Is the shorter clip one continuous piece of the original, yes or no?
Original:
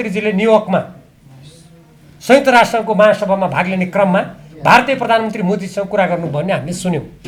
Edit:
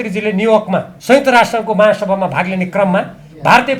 no